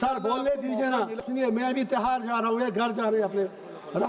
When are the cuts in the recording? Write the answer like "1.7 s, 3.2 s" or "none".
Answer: 1.2 s

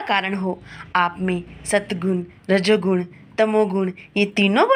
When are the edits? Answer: none

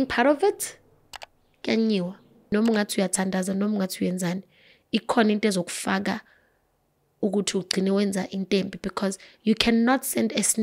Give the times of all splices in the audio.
2.5 s

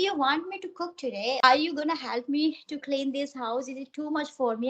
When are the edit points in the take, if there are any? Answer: 1.4 s

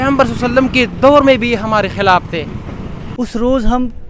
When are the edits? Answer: 3.0 s

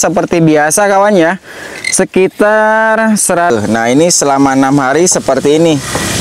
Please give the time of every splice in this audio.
3.5 s

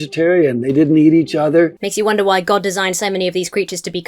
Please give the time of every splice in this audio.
1.8 s

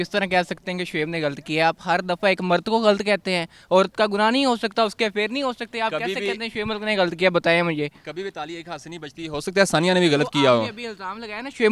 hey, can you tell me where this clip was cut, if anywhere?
none

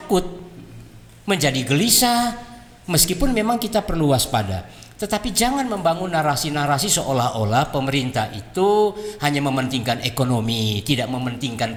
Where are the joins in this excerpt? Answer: none

